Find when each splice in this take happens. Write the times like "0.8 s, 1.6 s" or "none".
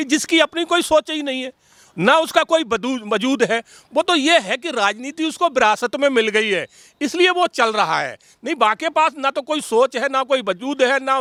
none